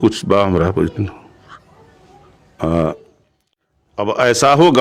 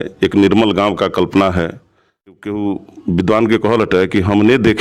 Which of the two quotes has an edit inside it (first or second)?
second